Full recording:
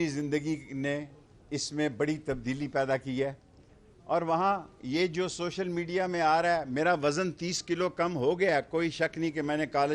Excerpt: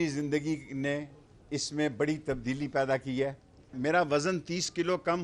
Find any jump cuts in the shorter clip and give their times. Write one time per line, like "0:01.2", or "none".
0:03.8